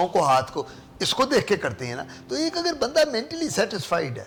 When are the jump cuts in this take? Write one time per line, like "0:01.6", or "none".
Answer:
none